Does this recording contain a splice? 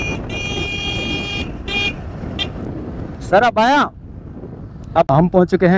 no; 0 cuts

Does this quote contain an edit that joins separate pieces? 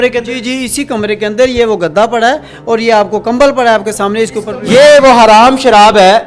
yes; 1 cut; at 4.5 s

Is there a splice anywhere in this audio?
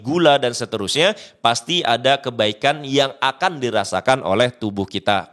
no; 0 cuts

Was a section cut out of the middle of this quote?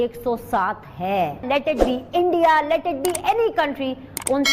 yes; 1 cut; at 1.4 s

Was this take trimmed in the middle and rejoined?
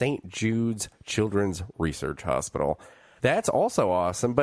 no; 0 cuts

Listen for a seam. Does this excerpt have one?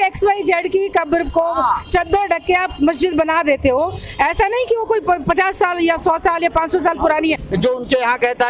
yes; 1 cut; at 7.4 s

